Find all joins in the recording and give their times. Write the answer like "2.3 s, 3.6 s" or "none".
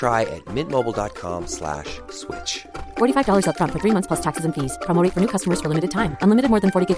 none